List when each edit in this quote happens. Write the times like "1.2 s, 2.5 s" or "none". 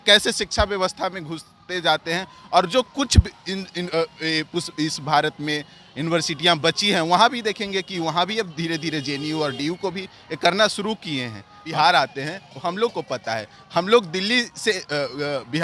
11.6 s